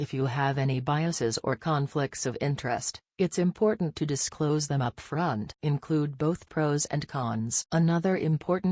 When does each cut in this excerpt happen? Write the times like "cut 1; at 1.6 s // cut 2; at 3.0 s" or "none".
cut 1; at 5.1 s // cut 2; at 7.2 s